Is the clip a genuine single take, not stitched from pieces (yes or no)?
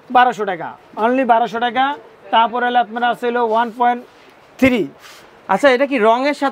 yes